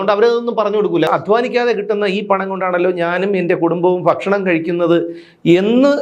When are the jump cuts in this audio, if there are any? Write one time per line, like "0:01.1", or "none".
0:01.1